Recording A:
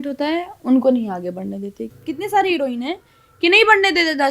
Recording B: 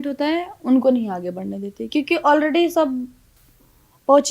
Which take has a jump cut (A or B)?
A